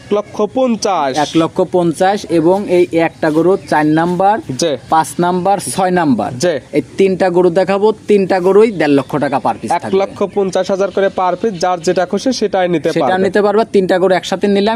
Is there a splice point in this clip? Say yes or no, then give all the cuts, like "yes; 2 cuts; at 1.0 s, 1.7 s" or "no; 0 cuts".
no; 0 cuts